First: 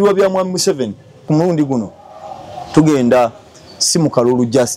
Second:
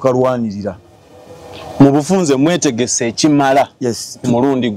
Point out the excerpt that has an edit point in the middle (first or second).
first